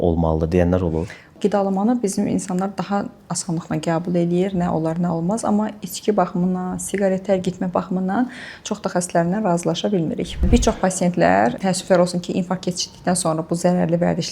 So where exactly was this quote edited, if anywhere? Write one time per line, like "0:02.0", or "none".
0:01.4
0:10.5
0:11.6